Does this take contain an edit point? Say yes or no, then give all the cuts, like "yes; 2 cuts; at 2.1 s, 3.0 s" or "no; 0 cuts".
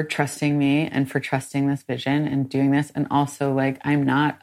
no; 0 cuts